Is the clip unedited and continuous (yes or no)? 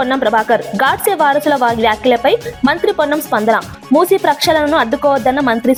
yes